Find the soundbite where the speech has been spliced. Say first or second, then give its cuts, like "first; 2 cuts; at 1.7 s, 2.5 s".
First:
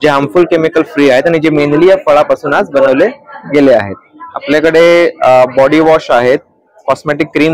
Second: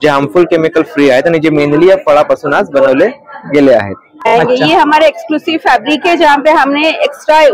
second; 1 cut; at 4.3 s